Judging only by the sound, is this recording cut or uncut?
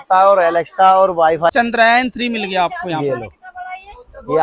cut